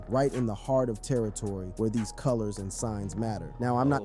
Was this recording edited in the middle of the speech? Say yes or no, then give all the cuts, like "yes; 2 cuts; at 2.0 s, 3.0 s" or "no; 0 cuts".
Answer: no; 0 cuts